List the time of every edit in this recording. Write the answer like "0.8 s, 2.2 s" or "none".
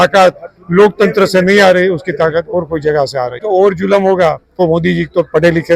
3.4 s, 4.5 s